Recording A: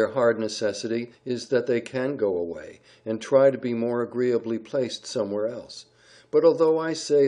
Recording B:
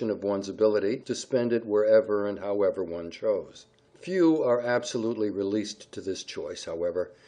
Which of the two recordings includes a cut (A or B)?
A